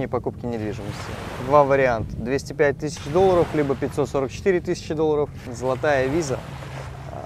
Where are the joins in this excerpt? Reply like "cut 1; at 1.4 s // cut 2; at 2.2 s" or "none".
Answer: cut 1; at 5.5 s